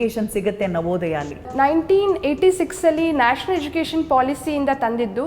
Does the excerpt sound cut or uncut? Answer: cut